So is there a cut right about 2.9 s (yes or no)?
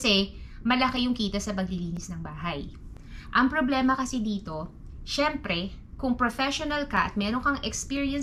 no